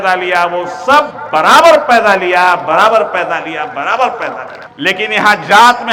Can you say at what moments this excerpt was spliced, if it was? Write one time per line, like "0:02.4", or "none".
none